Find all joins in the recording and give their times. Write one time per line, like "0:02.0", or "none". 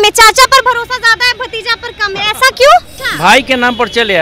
0:03.0